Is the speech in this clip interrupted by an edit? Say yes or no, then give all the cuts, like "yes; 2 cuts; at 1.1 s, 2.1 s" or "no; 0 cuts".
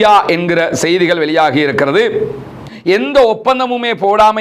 yes; 1 cut; at 2.6 s